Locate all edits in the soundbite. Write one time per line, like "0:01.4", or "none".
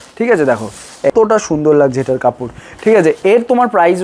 0:01.1